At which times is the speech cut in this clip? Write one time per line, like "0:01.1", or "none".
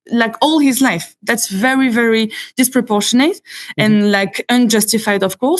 none